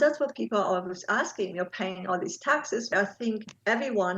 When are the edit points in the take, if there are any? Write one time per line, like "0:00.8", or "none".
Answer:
0:02.9